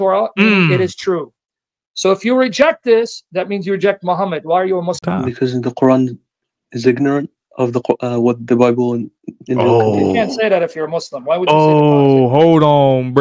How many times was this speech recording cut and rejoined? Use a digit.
1